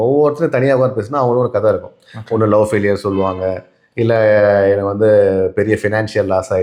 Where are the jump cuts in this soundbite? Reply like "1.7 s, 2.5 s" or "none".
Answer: none